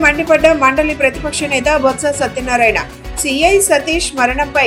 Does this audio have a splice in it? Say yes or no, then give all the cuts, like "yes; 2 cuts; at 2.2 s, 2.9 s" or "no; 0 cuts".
no; 0 cuts